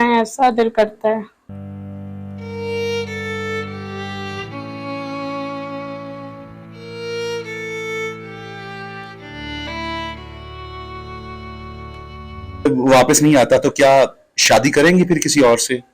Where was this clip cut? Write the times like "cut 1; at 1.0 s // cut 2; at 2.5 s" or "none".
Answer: cut 1; at 12.7 s